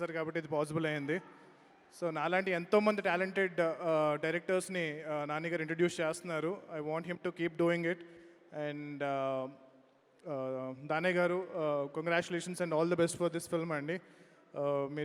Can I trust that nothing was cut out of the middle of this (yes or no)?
yes